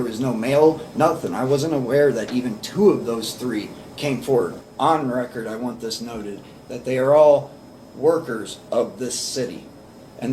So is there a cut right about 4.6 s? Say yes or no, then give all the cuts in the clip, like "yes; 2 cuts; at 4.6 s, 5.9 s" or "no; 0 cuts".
yes; 1 cut; at 4.6 s